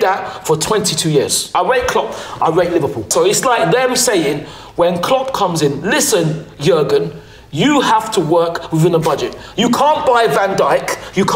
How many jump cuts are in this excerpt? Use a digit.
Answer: 2